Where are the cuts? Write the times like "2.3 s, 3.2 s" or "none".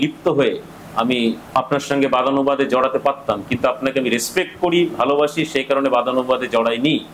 1.6 s